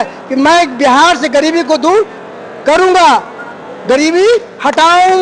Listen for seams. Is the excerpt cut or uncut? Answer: uncut